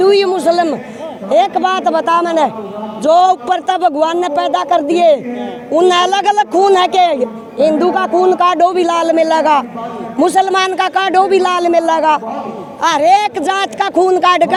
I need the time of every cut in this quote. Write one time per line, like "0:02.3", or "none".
none